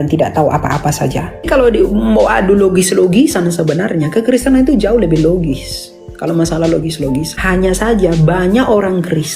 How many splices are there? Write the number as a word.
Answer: two